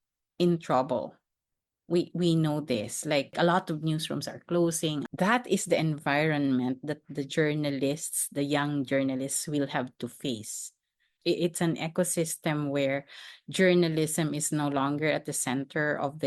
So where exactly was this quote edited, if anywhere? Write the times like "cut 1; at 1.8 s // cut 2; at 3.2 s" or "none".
none